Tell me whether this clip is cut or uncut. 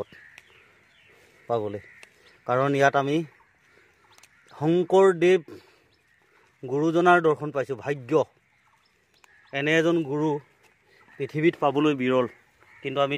uncut